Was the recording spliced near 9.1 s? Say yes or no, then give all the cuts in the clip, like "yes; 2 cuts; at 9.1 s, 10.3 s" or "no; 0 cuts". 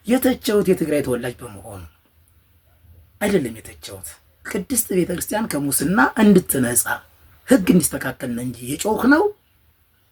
no; 0 cuts